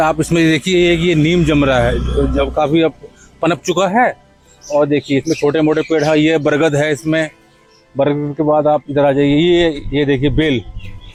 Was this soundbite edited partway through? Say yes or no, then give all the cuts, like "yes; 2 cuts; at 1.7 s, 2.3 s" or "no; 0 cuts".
no; 0 cuts